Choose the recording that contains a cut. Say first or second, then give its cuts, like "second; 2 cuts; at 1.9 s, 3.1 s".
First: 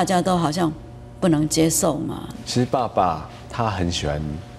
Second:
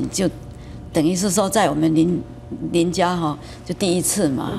first; 1 cut; at 2.4 s